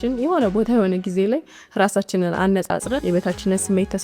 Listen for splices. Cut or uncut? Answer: cut